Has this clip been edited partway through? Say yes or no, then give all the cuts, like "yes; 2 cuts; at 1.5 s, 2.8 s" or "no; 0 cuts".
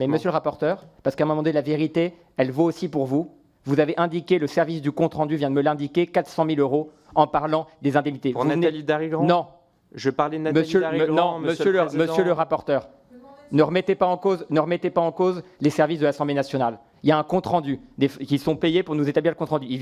no; 0 cuts